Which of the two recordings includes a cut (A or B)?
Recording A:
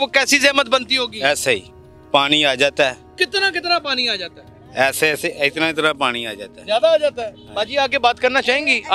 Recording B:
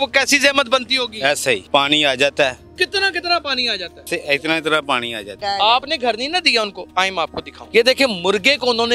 B